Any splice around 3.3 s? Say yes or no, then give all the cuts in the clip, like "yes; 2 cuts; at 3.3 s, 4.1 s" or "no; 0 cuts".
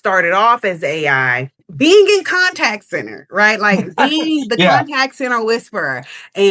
no; 1 cut; at 1.7 s